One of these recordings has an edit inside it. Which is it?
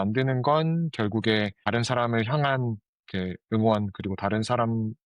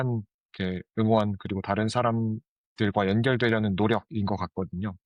first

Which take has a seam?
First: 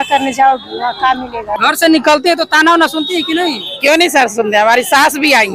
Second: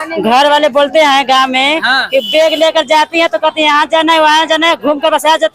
first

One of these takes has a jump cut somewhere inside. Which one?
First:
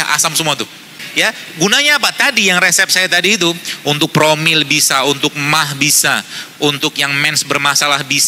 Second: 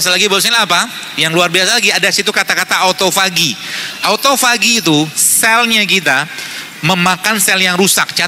first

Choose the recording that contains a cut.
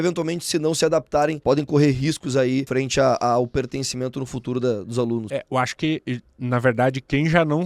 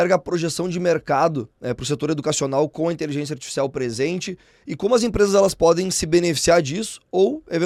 first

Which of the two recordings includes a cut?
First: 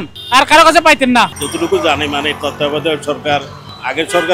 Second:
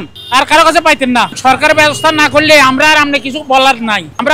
second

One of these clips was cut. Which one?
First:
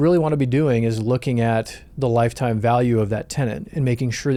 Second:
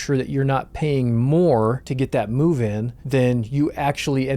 second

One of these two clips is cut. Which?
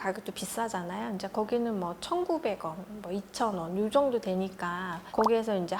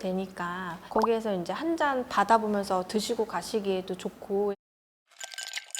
second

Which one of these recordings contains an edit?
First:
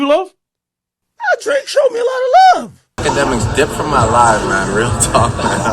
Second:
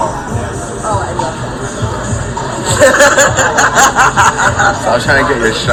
first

